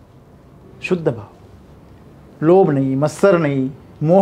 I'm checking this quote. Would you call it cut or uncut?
uncut